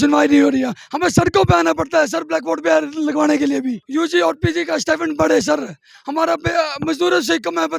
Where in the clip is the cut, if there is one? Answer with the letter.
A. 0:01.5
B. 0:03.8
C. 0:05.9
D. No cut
B